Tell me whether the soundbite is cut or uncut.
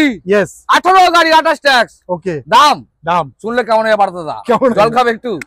uncut